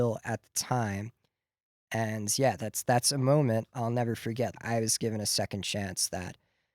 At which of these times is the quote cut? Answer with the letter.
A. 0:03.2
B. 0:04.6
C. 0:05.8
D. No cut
B